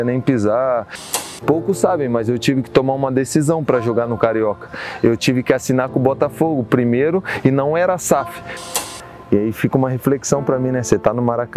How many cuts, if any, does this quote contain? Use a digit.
2